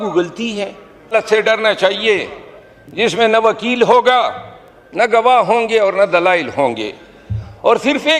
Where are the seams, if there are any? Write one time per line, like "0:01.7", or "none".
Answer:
0:01.1